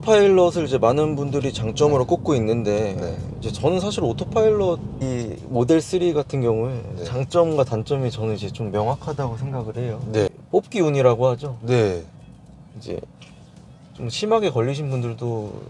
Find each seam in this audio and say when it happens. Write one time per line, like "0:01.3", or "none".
0:05.0
0:10.4